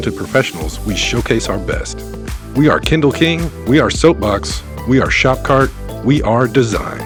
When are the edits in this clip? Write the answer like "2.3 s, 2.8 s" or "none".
none